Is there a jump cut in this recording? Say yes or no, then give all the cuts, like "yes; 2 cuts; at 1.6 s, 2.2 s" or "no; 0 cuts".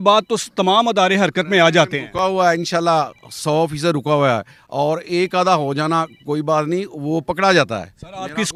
no; 0 cuts